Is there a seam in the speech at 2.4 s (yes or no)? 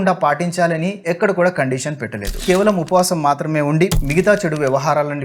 yes